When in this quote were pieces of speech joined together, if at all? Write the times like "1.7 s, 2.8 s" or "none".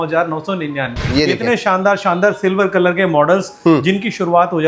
1.1 s